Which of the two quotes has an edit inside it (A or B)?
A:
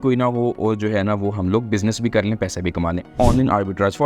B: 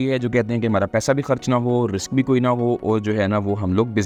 A